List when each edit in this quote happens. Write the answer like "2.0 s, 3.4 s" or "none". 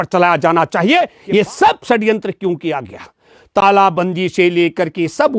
1.2 s